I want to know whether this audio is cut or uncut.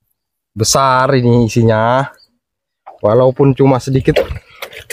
uncut